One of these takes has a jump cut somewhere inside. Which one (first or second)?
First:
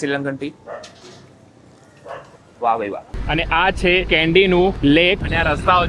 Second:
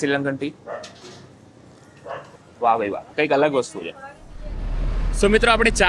first